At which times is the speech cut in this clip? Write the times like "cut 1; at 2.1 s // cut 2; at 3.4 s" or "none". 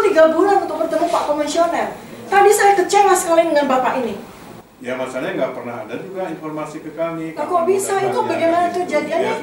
cut 1; at 4.5 s